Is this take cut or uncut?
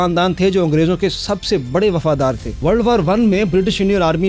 cut